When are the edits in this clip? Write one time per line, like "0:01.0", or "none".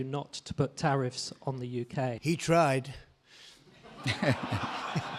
0:02.2